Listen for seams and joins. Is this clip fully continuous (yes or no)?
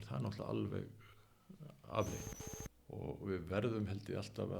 no